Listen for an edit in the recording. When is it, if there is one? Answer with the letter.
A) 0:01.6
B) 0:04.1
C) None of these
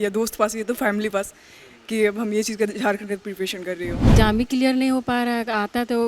B